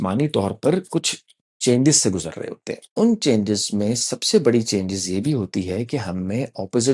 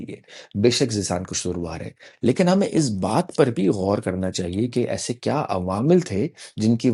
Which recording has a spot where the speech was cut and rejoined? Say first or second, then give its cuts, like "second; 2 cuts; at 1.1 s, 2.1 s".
first; 1 cut; at 2.8 s